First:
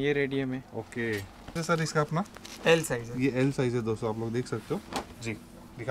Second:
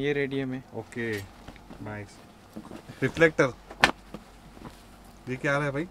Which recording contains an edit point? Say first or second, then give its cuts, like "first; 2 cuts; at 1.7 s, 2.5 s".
first; 1 cut; at 1.5 s